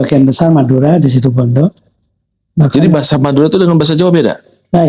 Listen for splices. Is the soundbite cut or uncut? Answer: uncut